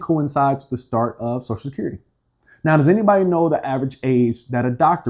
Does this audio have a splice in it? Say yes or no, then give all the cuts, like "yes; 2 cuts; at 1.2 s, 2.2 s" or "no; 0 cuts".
no; 0 cuts